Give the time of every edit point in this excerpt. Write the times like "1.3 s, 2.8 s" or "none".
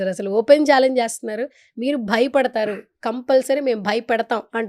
none